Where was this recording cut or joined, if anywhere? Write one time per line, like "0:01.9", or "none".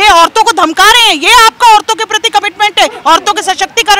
none